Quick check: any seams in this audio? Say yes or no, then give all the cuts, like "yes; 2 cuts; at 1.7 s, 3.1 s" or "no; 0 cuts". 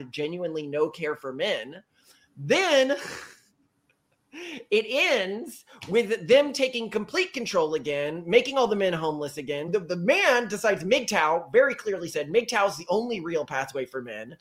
yes; 1 cut; at 9.7 s